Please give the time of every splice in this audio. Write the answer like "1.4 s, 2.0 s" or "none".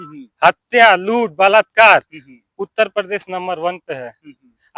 none